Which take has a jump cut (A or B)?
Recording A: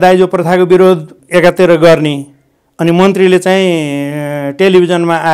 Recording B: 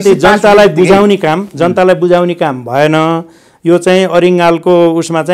A